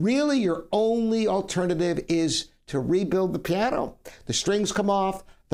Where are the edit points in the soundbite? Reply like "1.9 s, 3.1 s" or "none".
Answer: none